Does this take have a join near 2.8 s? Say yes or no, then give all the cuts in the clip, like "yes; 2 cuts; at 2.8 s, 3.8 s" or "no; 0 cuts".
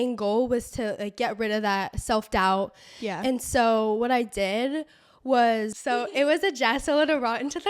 no; 1 cut; at 5.8 s